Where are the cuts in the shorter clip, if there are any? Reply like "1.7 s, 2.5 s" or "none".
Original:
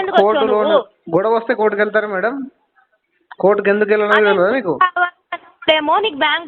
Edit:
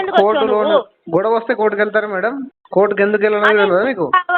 2.5 s